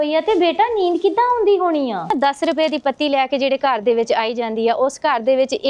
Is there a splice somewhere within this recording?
yes; 1 cut; at 2.1 s

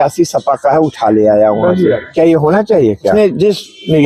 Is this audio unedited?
no; 2 cuts; at 2.1 s, 3.1 s

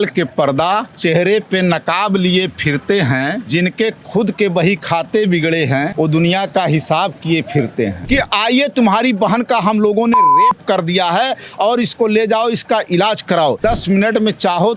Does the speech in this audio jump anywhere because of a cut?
yes; 5 cuts; at 0.9 s, 3.4 s, 5.9 s, 8.0 s, 13.6 s

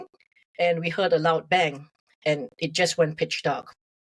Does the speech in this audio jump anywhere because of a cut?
no; 0 cuts

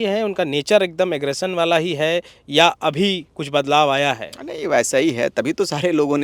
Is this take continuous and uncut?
yes; 0 cuts

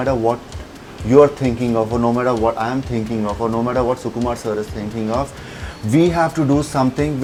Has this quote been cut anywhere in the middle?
no; 0 cuts

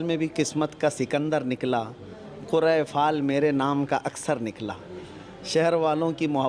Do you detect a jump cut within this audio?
no; 0 cuts

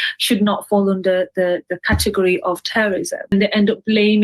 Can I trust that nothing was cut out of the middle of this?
no; 1 cut; at 3.3 s

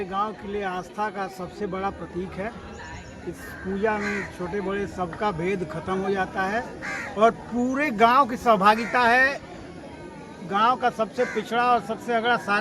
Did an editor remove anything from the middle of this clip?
no; 0 cuts

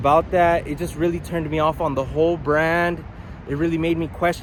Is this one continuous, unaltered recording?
yes; 0 cuts

